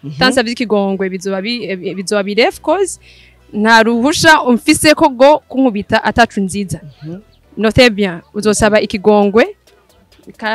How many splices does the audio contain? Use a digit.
0